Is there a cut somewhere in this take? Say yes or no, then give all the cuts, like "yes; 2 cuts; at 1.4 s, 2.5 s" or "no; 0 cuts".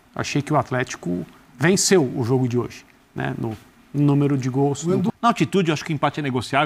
yes; 1 cut; at 5.1 s